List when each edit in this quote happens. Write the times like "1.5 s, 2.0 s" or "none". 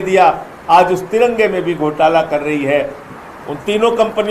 3.0 s